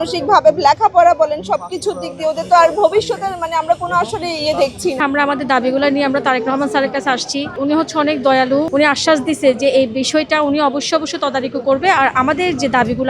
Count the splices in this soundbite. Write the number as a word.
three